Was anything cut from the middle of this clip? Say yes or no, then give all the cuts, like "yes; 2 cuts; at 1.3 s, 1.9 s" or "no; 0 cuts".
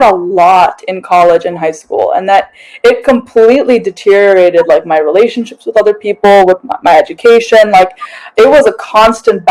no; 0 cuts